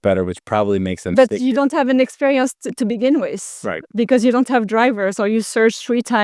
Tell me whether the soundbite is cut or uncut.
uncut